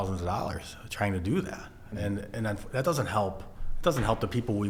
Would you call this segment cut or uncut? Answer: uncut